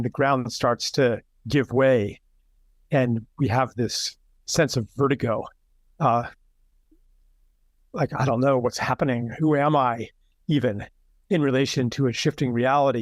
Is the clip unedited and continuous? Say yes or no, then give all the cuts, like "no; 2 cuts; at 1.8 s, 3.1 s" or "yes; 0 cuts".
yes; 0 cuts